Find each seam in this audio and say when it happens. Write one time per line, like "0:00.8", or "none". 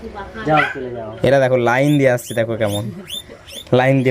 0:01.0